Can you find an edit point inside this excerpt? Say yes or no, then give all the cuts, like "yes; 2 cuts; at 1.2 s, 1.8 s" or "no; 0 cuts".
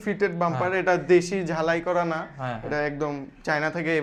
no; 0 cuts